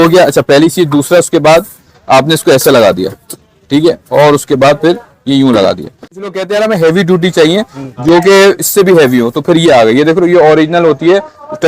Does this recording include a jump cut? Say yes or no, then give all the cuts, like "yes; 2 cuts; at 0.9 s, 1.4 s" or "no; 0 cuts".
yes; 1 cut; at 6.3 s